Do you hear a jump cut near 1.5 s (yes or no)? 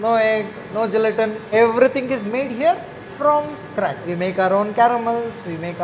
yes